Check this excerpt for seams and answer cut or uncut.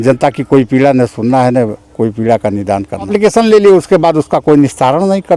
cut